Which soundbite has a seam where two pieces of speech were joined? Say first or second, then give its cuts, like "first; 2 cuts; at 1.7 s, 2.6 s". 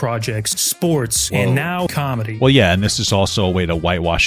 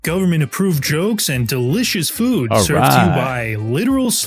first; 2 cuts; at 0.9 s, 2.1 s